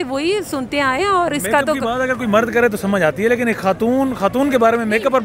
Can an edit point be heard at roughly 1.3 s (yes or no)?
no